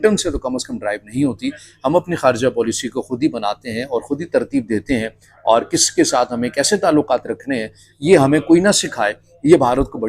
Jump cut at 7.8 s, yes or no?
no